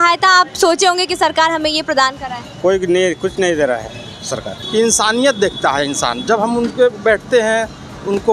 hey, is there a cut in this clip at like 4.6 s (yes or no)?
yes